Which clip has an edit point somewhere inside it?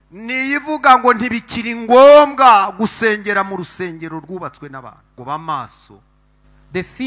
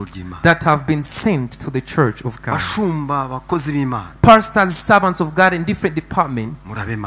first; 1 cut; at 5.2 s

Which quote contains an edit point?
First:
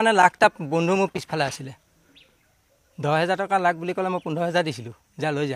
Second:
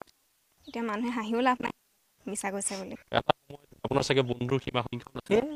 second; 1 cut; at 2.9 s

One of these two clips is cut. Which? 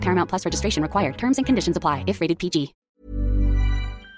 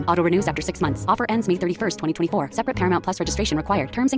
first; 1 cut; at 3.0 s

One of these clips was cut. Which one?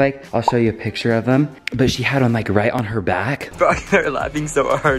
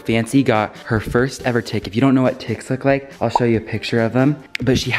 first; 1 cut; at 3.5 s

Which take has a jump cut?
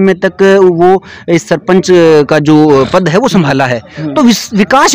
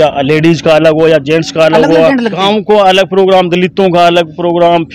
second; 1 cut; at 2.3 s

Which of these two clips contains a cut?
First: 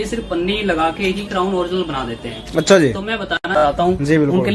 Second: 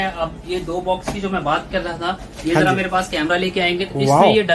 first; 1 cut; at 3.6 s

